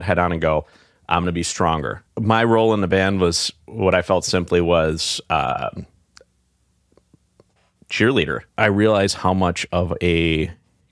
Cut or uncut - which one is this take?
cut